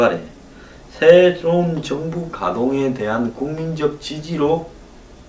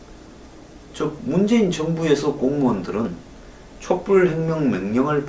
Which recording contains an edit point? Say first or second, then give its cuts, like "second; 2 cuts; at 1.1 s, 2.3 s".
first; 1 cut; at 3.5 s